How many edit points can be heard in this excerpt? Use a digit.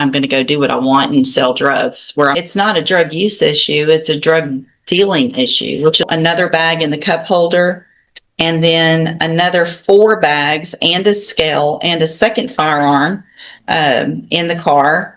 2